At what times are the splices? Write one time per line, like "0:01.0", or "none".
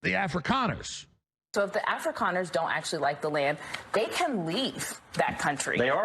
0:01.5